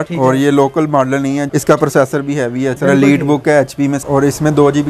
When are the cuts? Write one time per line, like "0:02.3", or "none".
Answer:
0:01.5
0:02.8
0:04.0